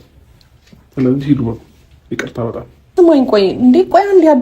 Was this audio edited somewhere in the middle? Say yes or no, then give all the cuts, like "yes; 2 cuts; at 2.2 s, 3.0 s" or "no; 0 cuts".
yes; 1 cut; at 2.9 s